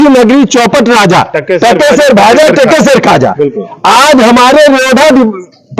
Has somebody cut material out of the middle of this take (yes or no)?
no